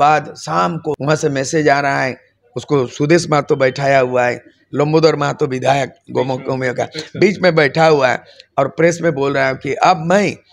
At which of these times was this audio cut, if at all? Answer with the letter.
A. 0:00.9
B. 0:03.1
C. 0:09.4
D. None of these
A